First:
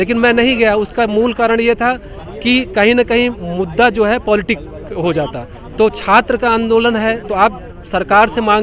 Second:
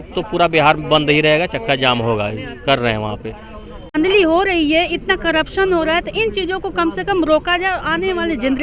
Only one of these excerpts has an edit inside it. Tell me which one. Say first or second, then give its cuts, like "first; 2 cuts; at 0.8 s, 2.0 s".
second; 1 cut; at 3.9 s